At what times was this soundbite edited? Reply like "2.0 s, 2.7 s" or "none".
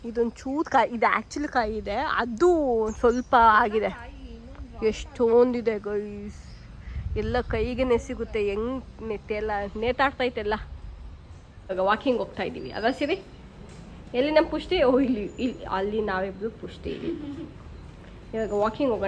none